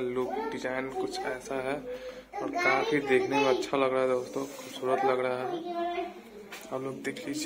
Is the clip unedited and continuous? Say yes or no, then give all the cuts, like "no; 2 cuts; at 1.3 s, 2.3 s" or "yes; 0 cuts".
yes; 0 cuts